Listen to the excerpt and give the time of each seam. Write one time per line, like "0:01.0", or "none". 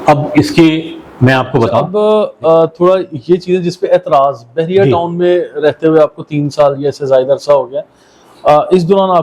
0:01.8

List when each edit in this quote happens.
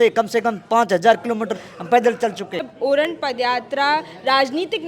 0:02.7

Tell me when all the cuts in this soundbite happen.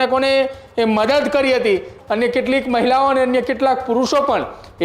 0:01.9

